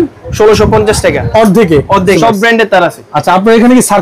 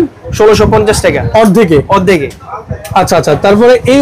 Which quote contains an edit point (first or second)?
first